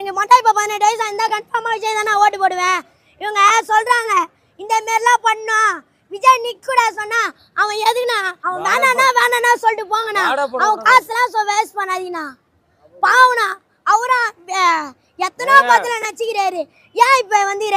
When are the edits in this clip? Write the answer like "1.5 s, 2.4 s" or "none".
8.3 s

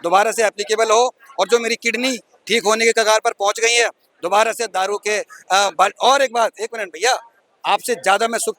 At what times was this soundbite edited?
none

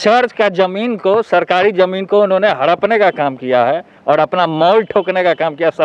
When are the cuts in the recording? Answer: none

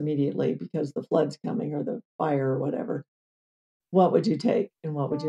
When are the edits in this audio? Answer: none

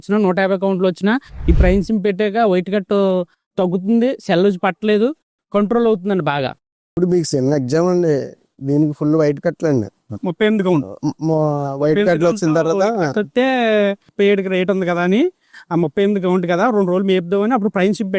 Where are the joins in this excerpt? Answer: none

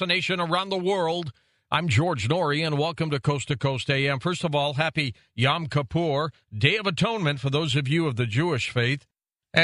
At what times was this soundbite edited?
none

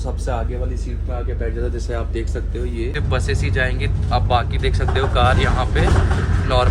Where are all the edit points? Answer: 2.9 s

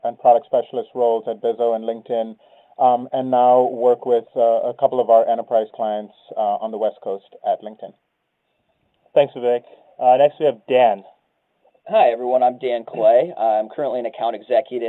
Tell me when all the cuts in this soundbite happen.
none

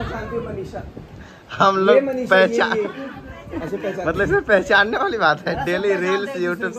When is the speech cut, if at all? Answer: none

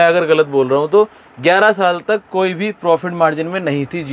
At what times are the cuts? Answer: none

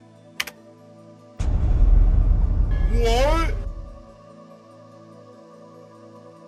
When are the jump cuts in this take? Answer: none

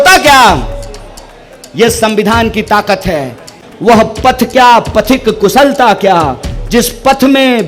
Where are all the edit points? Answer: 3.6 s

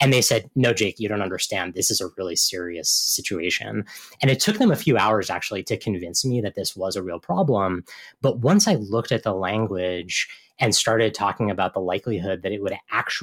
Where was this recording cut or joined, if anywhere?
1.8 s

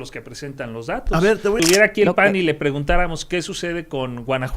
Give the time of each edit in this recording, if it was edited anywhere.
1.6 s

